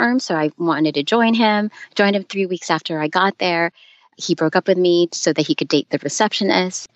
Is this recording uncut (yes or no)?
yes